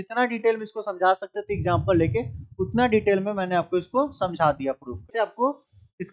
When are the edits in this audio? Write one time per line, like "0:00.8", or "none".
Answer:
0:05.1

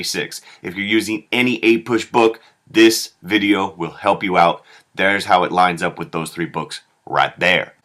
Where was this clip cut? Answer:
none

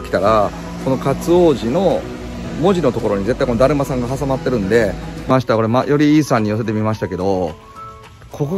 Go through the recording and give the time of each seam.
0:05.3

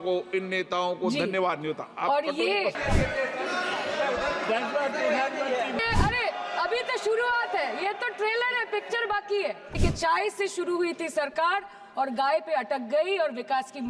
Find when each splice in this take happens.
0:02.8
0:05.8
0:09.8

